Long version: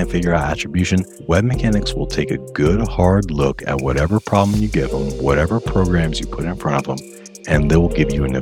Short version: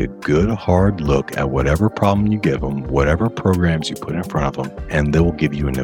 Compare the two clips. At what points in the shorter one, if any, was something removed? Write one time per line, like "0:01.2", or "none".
0:04.8